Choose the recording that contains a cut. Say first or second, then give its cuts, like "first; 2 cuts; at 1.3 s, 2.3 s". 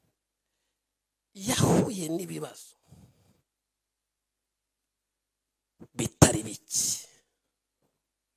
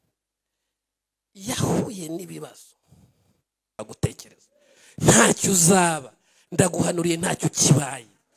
second; 1 cut; at 3.8 s